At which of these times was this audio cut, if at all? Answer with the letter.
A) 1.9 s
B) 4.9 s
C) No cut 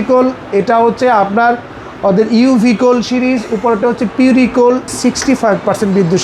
B